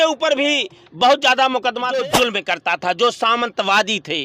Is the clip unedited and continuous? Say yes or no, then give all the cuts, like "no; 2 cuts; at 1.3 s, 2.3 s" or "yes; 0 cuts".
no; 1 cut; at 2.0 s